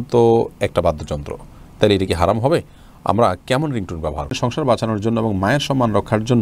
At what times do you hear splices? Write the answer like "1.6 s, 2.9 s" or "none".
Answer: 4.3 s